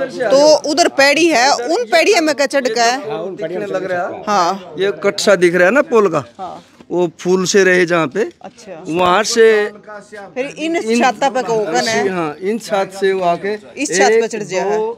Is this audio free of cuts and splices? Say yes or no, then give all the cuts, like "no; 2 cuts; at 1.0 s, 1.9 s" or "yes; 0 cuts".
yes; 0 cuts